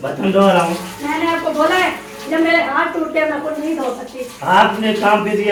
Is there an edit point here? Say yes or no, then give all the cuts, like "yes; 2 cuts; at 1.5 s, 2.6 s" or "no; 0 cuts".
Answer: no; 0 cuts